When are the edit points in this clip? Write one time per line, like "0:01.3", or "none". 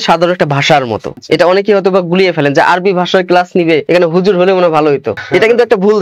0:01.1
0:03.8
0:05.1